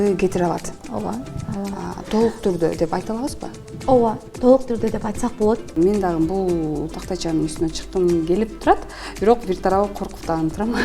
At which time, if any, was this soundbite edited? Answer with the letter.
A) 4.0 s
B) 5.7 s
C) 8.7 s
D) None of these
B